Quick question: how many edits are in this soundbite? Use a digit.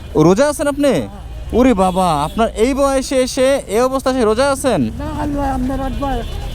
0